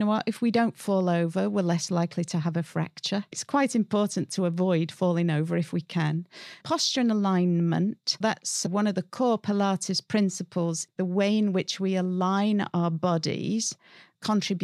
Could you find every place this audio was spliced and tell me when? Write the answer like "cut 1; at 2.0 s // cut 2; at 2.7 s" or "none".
cut 1; at 3.4 s // cut 2; at 8.2 s // cut 3; at 10.8 s